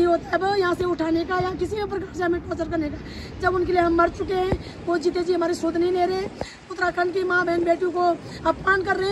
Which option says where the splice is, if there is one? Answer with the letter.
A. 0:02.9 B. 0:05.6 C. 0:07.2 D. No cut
D